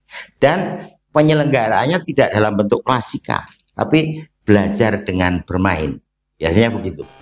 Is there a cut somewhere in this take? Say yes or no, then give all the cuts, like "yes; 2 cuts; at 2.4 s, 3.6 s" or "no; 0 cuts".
no; 0 cuts